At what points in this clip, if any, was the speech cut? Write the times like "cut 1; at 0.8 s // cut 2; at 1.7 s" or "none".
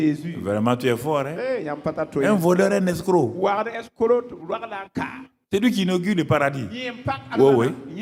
none